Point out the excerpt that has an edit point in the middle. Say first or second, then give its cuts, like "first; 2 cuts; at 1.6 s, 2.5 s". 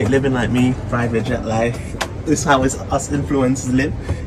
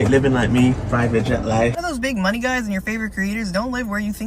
second; 1 cut; at 1.8 s